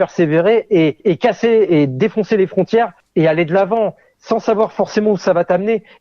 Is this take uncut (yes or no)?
no